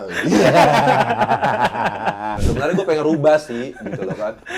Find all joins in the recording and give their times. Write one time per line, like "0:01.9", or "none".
0:02.4